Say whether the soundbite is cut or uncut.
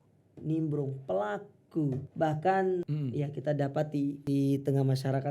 cut